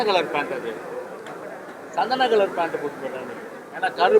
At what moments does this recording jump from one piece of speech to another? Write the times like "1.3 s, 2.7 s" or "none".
none